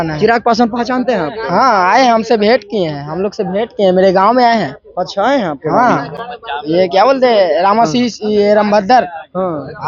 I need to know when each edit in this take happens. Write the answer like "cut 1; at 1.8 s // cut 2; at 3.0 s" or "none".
none